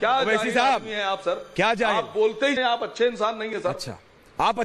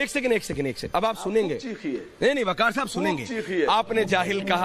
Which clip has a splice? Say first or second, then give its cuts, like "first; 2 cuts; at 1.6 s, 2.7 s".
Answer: first; 1 cut; at 2.6 s